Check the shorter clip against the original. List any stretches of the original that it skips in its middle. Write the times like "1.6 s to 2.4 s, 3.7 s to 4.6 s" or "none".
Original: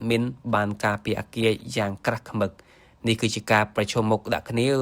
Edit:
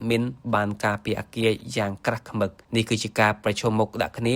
2.6 s to 2.9 s